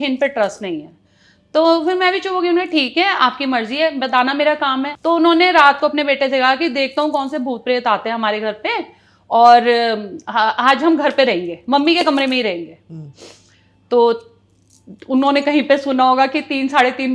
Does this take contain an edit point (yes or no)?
yes